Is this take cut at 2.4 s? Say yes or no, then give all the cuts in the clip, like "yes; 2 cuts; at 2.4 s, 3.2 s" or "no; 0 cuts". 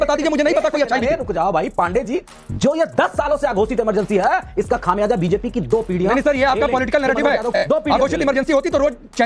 yes; 2 cuts; at 2.4 s, 7.6 s